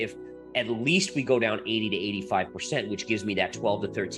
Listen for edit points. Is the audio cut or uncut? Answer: uncut